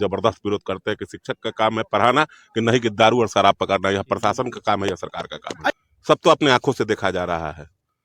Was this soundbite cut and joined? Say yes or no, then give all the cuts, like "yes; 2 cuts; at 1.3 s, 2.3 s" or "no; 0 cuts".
yes; 1 cut; at 5.7 s